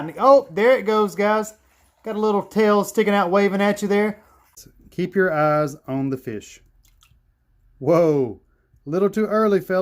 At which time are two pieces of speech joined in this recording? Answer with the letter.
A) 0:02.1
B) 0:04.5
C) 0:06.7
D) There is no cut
B